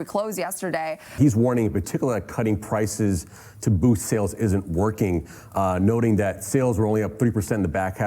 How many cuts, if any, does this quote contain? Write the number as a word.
one